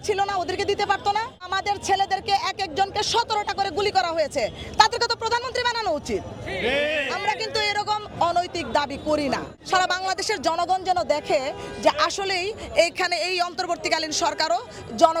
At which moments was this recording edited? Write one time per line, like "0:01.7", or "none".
0:01.5
0:09.5

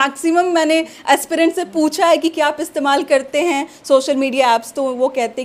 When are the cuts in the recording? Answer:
none

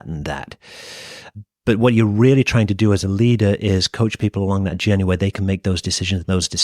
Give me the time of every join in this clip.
0:01.4

